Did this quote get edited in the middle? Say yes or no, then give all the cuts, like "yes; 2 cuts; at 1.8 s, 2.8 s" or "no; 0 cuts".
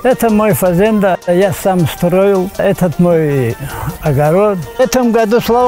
yes; 3 cuts; at 1.2 s, 2.6 s, 4.7 s